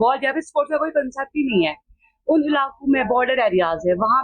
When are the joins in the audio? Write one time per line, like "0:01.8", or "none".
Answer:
none

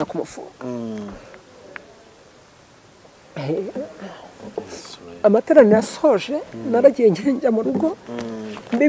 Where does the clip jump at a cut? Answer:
none

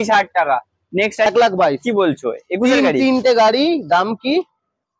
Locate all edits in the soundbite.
0:01.3

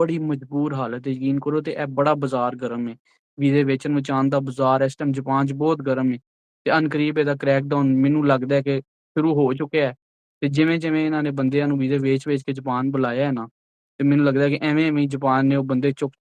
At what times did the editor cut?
none

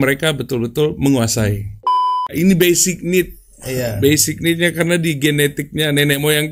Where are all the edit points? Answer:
0:02.2

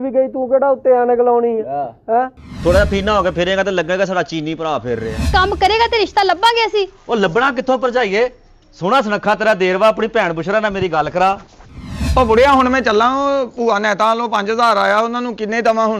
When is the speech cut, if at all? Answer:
0:05.2
0:12.0

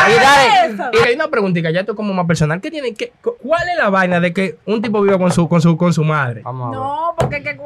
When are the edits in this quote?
0:01.0
0:03.4
0:04.6
0:06.4

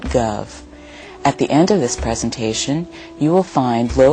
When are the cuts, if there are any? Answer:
0:02.6

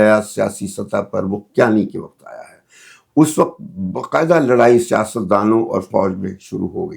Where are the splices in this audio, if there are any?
none

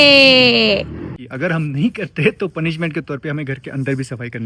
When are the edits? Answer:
0:01.2

